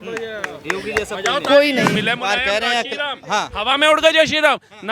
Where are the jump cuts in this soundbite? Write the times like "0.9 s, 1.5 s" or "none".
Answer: 2.0 s